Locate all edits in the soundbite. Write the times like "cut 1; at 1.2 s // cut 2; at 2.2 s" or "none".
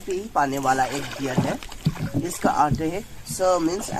cut 1; at 1.8 s